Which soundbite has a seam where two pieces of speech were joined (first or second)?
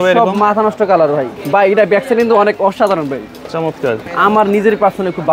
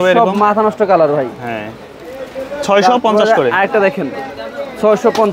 first